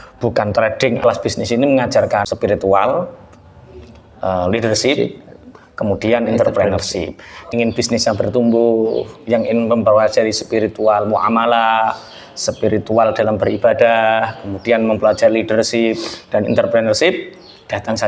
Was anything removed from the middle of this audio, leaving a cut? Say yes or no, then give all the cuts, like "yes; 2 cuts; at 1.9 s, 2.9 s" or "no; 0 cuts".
yes; 3 cuts; at 1.0 s, 2.3 s, 7.5 s